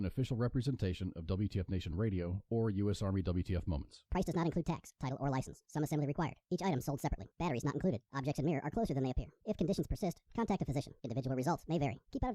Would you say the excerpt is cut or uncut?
uncut